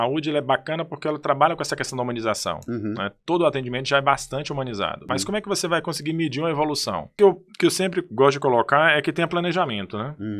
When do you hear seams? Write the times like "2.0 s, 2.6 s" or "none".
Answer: 5.1 s, 7.1 s